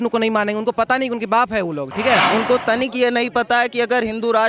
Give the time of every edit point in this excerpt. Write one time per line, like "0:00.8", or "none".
0:02.3